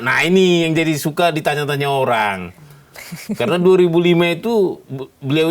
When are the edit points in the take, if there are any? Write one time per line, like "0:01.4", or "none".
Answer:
none